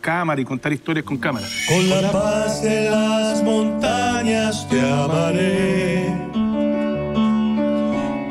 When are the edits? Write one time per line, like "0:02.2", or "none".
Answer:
0:01.5